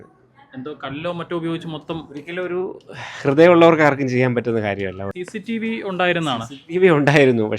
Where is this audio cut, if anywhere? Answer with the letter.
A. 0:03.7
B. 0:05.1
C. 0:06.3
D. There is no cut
B